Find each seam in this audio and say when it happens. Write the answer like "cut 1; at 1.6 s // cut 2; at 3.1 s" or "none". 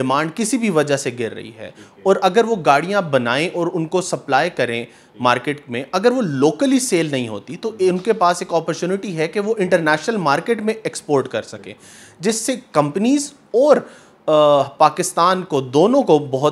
none